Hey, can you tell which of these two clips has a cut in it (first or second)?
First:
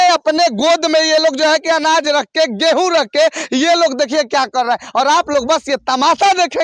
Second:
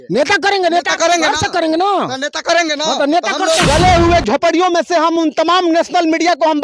second